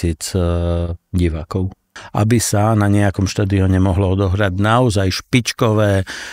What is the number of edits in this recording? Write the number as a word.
one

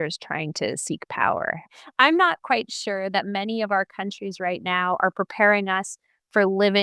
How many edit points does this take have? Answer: one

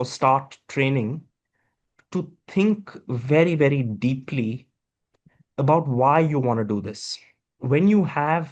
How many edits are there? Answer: one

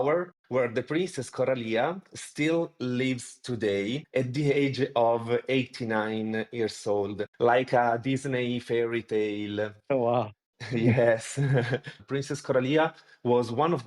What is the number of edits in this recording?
two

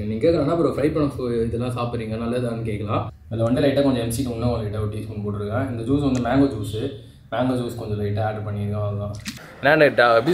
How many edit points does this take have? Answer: two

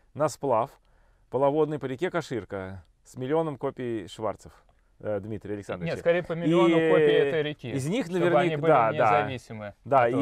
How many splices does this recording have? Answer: zero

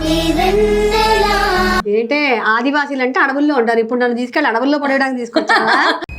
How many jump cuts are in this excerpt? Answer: one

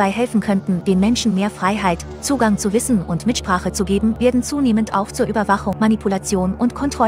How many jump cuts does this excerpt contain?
three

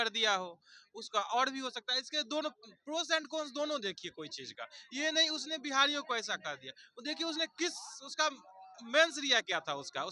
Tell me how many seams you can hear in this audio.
zero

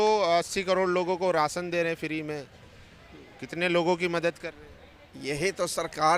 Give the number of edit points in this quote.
zero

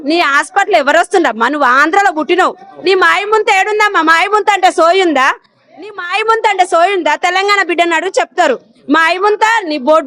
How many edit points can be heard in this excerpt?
zero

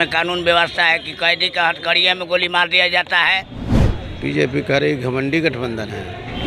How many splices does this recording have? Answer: one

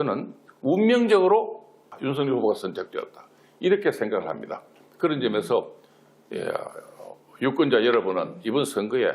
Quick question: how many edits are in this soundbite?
one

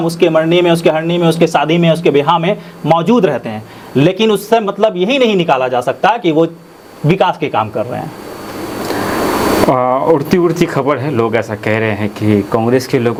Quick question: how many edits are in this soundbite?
zero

